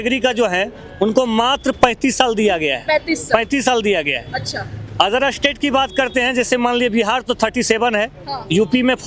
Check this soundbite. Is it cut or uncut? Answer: uncut